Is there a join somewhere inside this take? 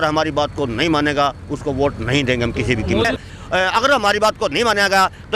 yes; 1 cut; at 3.1 s

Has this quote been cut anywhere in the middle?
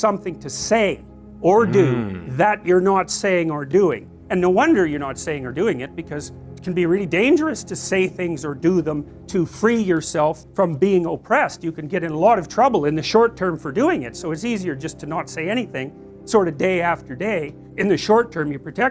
no; 0 cuts

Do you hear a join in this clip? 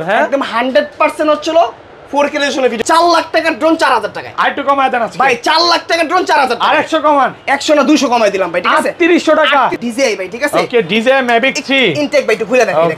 yes; 2 cuts; at 2.8 s, 9.7 s

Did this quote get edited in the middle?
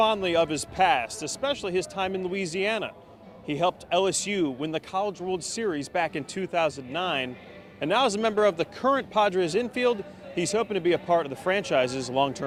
no; 0 cuts

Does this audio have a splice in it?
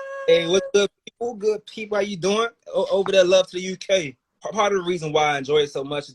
yes; 1 cut; at 4.4 s

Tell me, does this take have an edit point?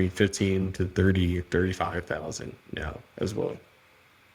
no; 0 cuts

